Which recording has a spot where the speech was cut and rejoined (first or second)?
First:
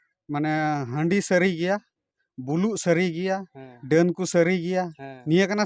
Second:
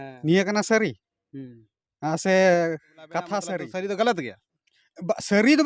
second